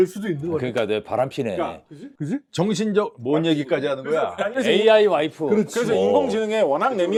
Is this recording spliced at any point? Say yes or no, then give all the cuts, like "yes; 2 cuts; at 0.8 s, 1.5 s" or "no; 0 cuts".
no; 0 cuts